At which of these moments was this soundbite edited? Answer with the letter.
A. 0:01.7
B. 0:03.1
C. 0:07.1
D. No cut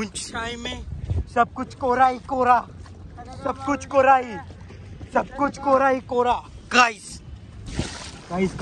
C